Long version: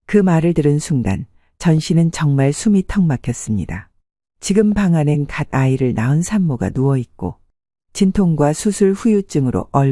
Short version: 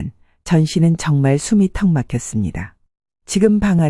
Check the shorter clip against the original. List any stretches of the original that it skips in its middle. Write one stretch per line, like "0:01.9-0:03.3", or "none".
none